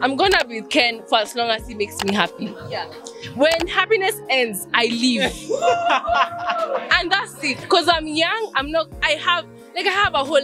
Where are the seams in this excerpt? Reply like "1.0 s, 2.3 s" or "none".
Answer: none